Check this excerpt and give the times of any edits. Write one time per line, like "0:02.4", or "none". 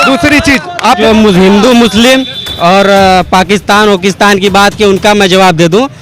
0:01.0